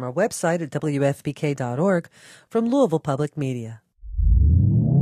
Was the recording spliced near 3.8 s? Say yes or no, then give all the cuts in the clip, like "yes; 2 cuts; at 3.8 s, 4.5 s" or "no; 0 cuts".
yes; 1 cut; at 3.8 s